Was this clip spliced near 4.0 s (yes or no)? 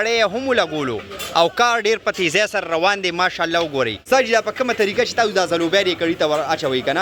yes